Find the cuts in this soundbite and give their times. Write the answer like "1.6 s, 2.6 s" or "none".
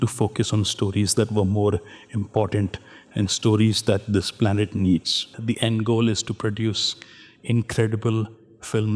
5.3 s